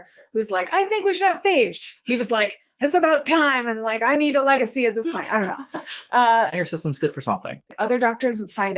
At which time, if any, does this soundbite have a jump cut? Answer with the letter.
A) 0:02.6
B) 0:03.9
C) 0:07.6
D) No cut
C